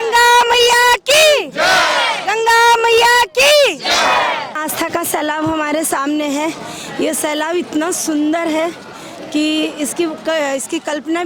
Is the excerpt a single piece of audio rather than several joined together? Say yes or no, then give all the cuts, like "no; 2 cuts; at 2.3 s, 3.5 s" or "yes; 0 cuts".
no; 1 cut; at 4.5 s